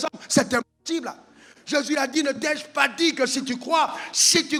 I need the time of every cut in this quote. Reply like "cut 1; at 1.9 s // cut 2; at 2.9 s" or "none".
none